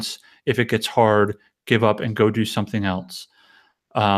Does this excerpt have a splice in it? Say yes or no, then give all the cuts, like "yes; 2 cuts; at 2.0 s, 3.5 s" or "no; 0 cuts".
no; 0 cuts